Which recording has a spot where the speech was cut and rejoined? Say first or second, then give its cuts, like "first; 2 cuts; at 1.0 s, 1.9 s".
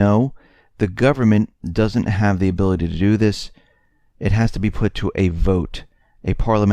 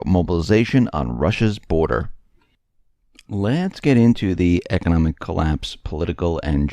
second; 1 cut; at 3.1 s